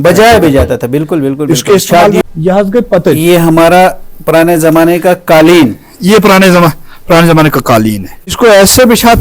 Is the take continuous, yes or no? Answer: no